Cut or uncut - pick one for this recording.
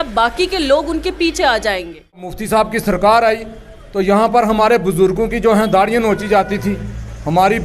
cut